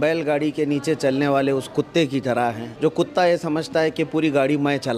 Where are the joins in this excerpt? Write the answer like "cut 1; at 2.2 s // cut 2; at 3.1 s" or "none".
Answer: cut 1; at 2.3 s